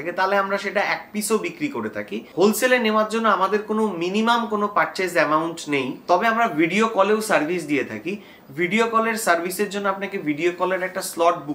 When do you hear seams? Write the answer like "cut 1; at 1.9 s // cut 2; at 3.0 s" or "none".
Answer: none

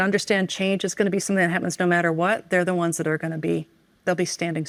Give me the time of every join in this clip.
none

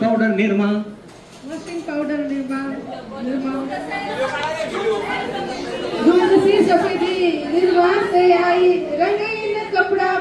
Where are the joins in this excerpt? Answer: none

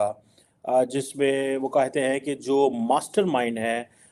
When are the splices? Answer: none

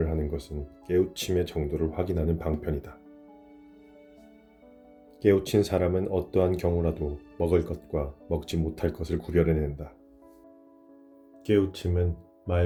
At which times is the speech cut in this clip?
none

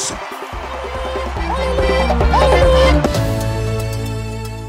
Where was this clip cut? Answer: cut 1; at 3.1 s

